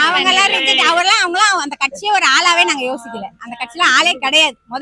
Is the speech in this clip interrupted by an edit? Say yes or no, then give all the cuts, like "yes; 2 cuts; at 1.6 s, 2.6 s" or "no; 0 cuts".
no; 0 cuts